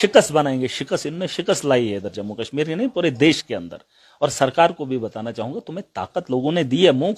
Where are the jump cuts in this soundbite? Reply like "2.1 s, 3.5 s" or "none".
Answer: none